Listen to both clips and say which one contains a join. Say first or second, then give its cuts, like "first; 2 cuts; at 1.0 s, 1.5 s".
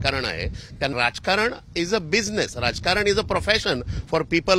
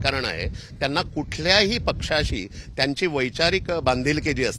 first; 1 cut; at 0.9 s